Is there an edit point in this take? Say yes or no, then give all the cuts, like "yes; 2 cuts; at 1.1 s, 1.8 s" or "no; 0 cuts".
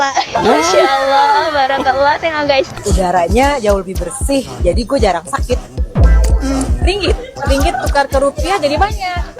yes; 1 cut; at 2.8 s